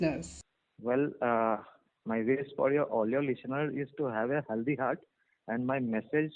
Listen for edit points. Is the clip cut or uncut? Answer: uncut